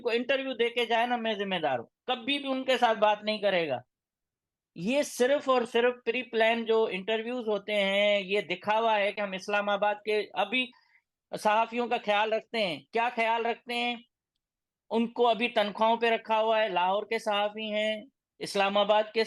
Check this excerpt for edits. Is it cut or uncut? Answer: uncut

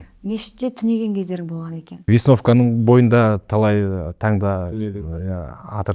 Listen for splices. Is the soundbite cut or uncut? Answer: cut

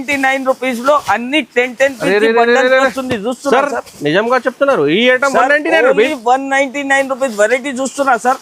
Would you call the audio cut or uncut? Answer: uncut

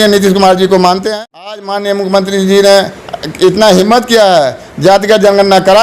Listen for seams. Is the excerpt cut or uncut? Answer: cut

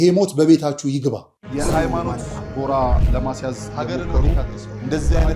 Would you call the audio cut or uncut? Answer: cut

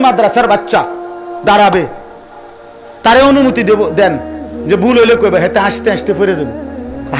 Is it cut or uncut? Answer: uncut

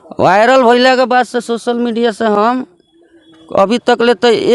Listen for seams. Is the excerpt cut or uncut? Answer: uncut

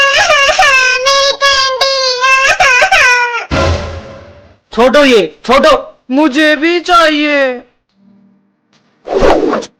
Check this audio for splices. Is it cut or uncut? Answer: uncut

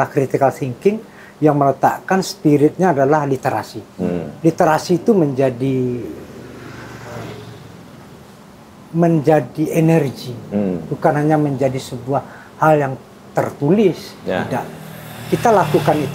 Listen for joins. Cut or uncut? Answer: uncut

